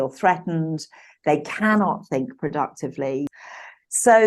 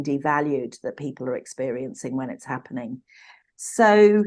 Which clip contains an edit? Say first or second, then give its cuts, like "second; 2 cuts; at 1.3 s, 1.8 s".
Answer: first; 1 cut; at 3.3 s